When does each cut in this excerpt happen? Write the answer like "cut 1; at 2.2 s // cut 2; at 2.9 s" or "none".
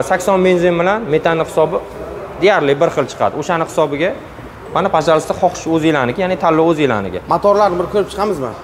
none